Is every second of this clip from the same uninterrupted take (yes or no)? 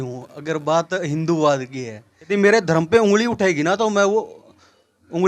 no